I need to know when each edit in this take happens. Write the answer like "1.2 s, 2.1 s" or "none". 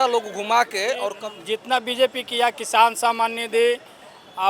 1.1 s

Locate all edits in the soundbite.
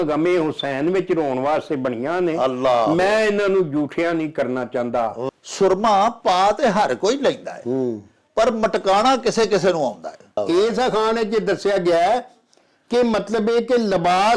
5.3 s, 10.4 s

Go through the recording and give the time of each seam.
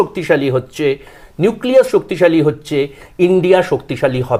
none

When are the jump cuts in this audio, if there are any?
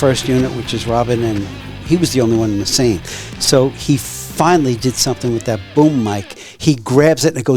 none

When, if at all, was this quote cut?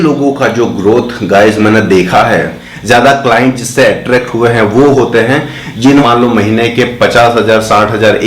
2.7 s, 6.0 s

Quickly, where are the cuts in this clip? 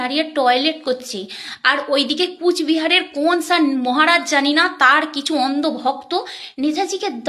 none

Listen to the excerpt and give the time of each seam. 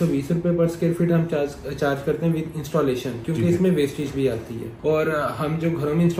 4.6 s

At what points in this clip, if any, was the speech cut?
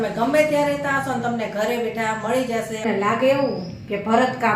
2.8 s

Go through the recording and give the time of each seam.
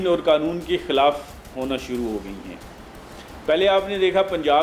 none

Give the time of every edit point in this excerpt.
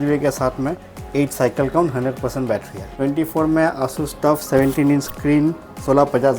0.9 s, 2.9 s

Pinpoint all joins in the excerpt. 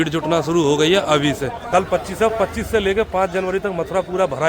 1.6 s

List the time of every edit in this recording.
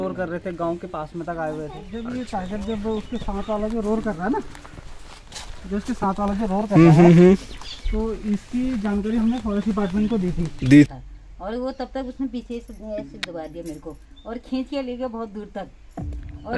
2.1 s, 10.9 s

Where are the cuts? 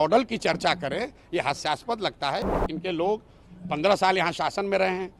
2.5 s

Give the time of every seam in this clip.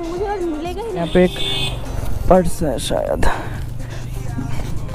1.0 s

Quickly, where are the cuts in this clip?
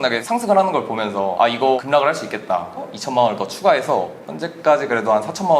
2.9 s, 4.2 s

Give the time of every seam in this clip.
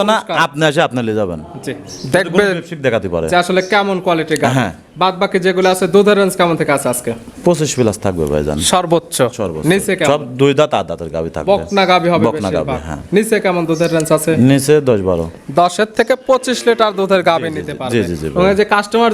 none

